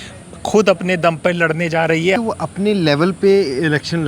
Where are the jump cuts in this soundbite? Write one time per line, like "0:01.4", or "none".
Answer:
0:02.2